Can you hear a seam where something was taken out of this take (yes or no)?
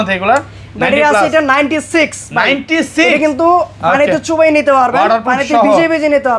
no